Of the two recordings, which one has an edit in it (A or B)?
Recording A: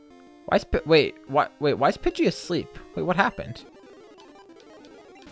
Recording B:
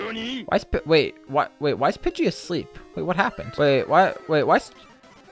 B